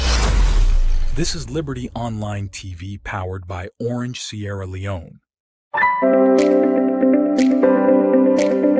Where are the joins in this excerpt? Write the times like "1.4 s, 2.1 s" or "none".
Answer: 6.0 s